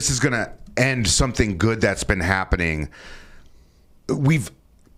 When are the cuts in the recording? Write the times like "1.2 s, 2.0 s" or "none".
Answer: none